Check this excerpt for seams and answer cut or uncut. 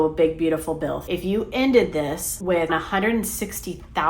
cut